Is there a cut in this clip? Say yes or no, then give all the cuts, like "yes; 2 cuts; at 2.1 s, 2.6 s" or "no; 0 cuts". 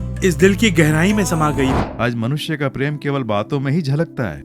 yes; 1 cut; at 1.7 s